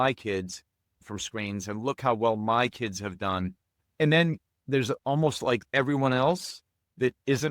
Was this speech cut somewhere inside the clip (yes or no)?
yes